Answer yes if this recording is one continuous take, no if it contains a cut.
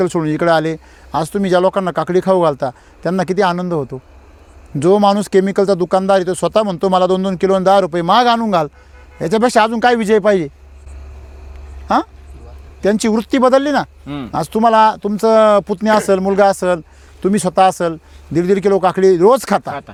yes